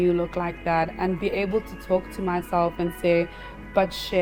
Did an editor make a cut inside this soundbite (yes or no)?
no